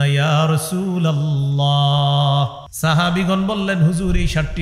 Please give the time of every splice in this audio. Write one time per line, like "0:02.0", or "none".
0:02.6

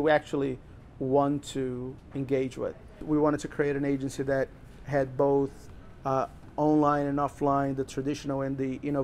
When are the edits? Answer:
0:03.0

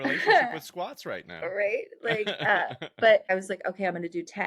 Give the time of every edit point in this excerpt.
0:03.3

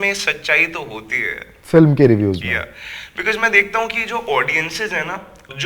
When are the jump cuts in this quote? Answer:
none

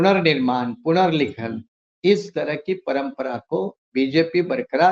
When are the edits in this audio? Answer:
none

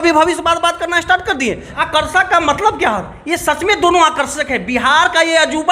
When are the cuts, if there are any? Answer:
0:01.7

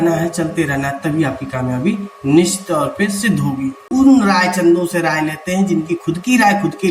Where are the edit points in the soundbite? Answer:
0:03.8

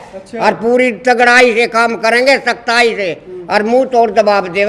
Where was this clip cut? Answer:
none

